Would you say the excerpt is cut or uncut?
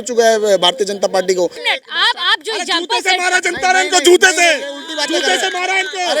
cut